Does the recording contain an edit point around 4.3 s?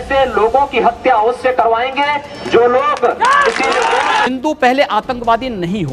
yes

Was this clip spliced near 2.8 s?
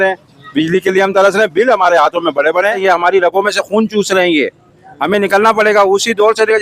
yes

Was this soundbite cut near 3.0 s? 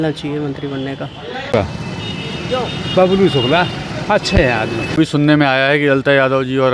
no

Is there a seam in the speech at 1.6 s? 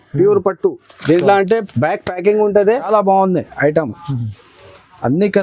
no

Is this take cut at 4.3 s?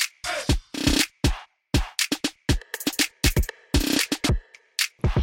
yes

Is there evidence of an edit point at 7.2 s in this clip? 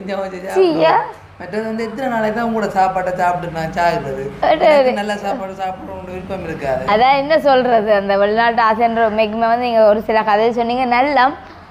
no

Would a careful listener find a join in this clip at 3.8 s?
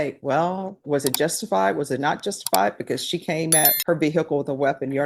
yes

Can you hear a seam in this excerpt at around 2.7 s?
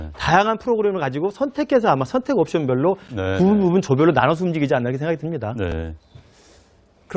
yes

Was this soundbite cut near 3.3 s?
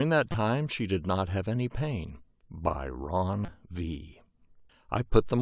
no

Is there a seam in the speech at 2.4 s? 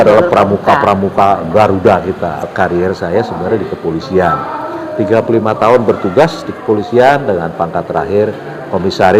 yes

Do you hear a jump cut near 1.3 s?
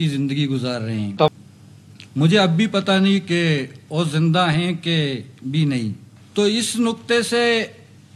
yes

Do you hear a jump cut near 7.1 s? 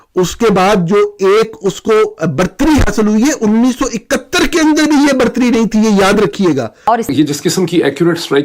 yes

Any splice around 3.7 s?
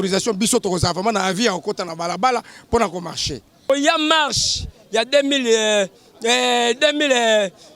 yes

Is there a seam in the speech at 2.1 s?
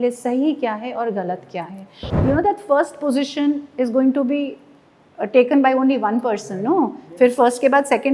yes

